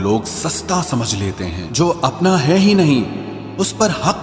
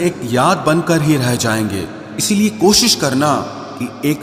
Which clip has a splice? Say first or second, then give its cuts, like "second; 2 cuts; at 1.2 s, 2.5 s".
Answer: first; 1 cut; at 1.6 s